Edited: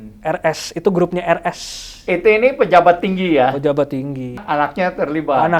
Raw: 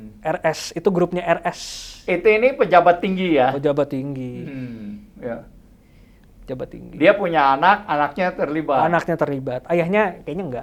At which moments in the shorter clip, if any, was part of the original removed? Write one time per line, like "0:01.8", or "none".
0:04.4